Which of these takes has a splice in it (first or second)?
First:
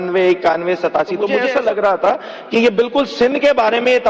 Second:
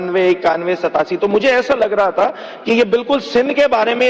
first